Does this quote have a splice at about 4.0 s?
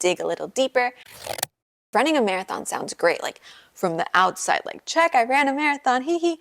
no; 1 cut; at 1.3 s

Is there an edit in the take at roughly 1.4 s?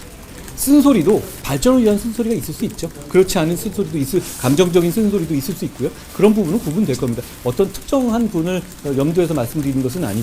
yes; 1 cut; at 1.4 s

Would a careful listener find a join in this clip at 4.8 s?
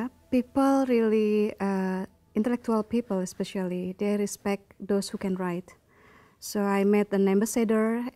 no; 1 cut; at 2.2 s

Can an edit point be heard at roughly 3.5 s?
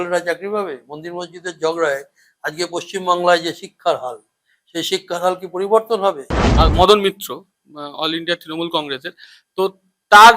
no; 1 cut; at 6.5 s

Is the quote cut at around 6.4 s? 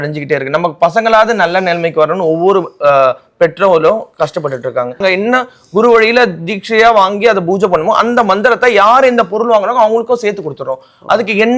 no; 1 cut; at 5.0 s

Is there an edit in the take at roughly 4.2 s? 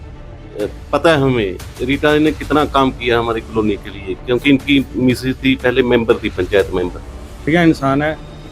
no; 1 cut; at 7.3 s

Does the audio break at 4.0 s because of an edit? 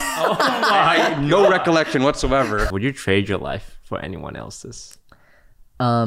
no; 1 cut; at 2.6 s

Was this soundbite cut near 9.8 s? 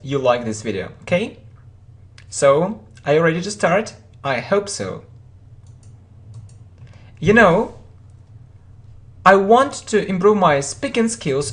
yes; 1 cut; at 9.8 s

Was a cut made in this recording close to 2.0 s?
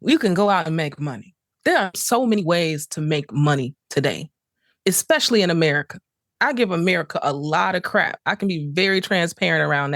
yes; 1 cut; at 2.0 s

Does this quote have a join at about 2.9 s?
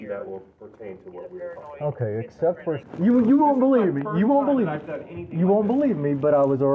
yes; 1 cut; at 2.9 s

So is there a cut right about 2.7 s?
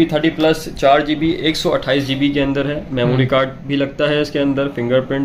no; 0 cuts

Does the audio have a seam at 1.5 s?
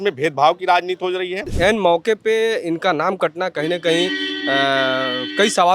yes; 1 cut; at 1.5 s

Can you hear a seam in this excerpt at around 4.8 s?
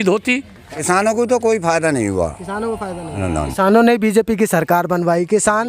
no; 2 cuts; at 0.8 s, 3.3 s

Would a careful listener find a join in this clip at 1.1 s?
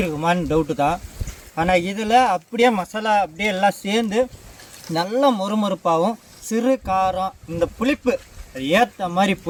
no; 0 cuts

